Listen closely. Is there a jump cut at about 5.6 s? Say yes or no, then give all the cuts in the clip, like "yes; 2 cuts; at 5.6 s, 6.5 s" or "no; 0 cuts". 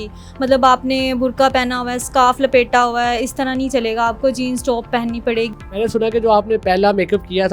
yes; 1 cut; at 5.6 s